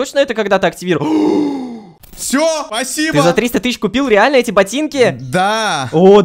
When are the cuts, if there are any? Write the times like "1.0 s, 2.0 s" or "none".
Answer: 1.8 s, 2.7 s